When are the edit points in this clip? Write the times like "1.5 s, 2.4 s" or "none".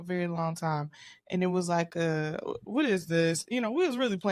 none